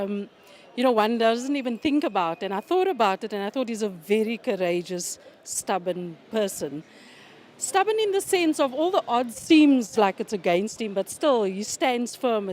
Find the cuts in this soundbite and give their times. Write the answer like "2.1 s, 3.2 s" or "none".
9.1 s